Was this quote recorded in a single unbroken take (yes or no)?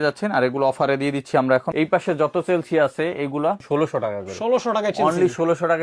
no